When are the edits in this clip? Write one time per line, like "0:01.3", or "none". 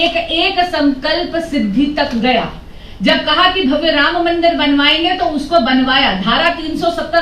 none